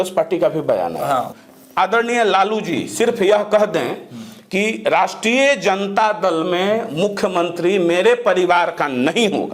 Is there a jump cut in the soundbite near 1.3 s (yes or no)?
yes